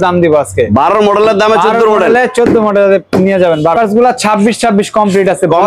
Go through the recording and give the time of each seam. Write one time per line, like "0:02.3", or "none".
0:03.7